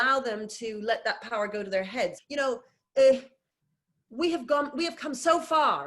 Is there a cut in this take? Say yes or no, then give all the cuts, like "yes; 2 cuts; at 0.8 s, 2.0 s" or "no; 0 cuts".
yes; 1 cut; at 2.2 s